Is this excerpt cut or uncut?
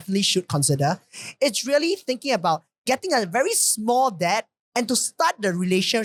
uncut